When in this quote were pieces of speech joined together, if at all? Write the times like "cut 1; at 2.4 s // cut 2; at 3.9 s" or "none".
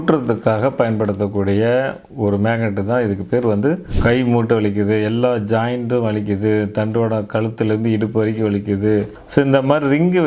cut 1; at 3.9 s // cut 2; at 9.2 s